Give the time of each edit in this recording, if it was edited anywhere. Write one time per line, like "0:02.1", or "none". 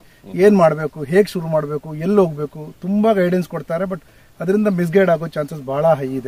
none